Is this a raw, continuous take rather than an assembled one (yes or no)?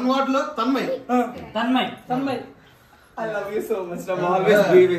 yes